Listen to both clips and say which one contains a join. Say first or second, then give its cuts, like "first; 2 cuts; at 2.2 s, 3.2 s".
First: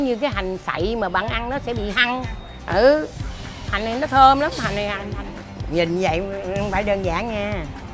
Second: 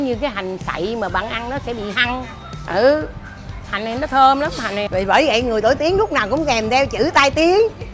second; 1 cut; at 4.9 s